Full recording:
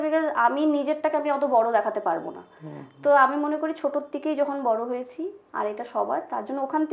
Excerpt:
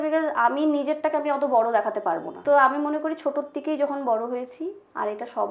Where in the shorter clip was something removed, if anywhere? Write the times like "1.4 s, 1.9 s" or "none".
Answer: 2.3 s